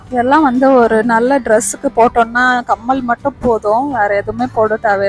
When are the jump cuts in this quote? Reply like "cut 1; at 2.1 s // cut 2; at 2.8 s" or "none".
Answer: none